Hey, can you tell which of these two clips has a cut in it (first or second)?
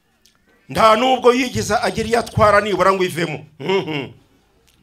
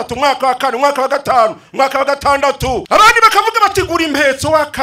second